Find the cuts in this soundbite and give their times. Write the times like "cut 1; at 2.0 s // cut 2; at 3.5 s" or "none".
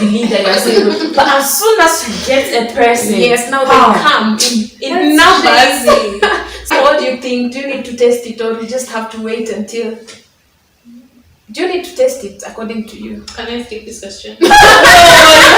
cut 1; at 6.7 s